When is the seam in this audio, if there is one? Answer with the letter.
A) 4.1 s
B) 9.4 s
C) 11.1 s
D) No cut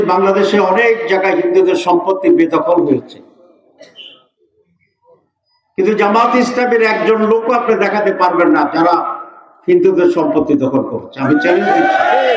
D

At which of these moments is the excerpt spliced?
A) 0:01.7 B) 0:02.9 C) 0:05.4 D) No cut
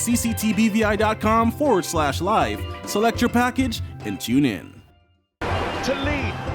C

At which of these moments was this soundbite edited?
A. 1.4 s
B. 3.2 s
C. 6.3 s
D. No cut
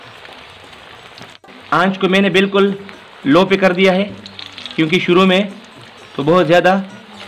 A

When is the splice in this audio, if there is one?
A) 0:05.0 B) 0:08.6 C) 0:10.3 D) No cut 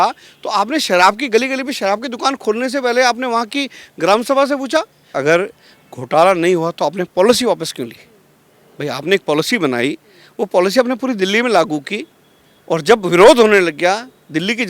A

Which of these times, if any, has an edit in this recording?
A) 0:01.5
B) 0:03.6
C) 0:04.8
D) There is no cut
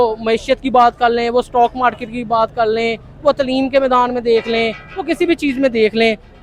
D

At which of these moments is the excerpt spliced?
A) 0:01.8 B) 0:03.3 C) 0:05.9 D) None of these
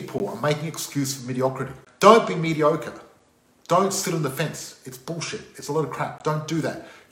A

